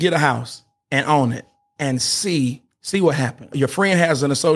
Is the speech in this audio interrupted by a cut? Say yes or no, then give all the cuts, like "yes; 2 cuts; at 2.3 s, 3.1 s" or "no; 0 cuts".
yes; 2 cuts; at 2.7 s, 3.5 s